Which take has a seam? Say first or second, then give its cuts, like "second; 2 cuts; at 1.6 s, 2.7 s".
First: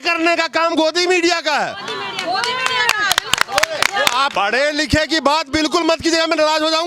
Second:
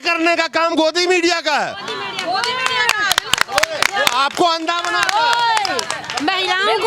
first; 1 cut; at 4.3 s